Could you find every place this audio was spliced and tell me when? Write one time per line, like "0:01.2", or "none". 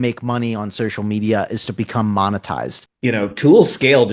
0:02.8